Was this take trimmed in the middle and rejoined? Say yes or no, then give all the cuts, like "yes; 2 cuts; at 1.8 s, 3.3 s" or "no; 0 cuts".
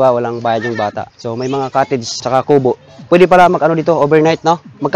yes; 1 cut; at 2.1 s